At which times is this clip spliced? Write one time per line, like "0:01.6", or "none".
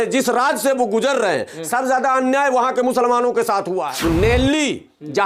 0:03.9

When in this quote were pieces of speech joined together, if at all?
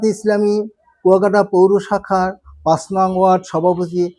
none

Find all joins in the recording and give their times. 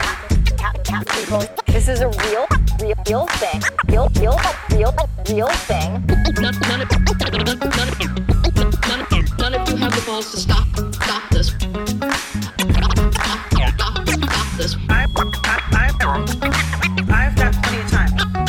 none

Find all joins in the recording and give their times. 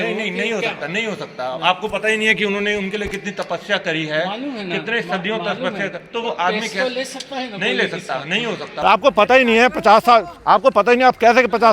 0:08.7

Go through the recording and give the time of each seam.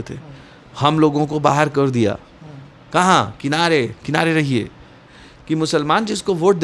0:05.1

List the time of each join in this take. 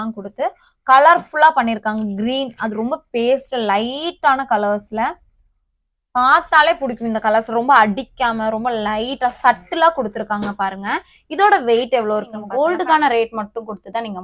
0:12.4

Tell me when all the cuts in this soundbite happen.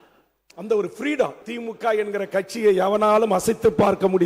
0:01.4

